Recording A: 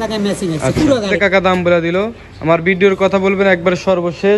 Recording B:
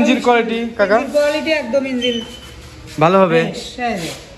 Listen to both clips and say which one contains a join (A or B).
A